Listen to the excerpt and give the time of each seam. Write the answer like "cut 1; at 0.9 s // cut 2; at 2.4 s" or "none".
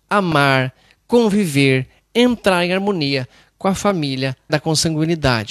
cut 1; at 4.4 s